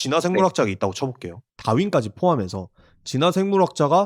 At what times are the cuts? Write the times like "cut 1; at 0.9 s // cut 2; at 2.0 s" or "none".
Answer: cut 1; at 1.5 s